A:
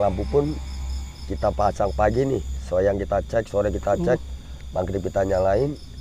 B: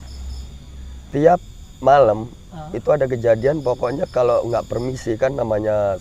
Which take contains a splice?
B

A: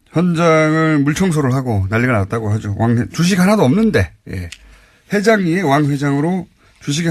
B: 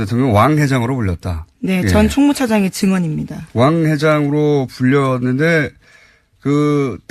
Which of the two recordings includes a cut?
B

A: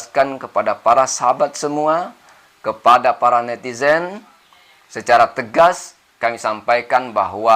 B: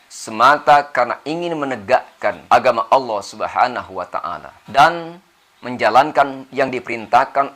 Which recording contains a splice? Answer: B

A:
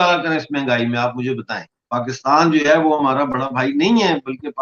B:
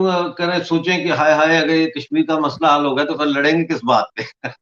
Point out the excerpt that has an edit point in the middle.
A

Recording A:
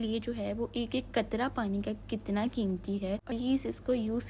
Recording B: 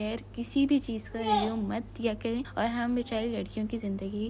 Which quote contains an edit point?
A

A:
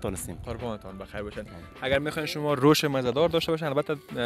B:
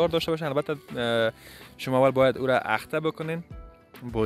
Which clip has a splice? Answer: A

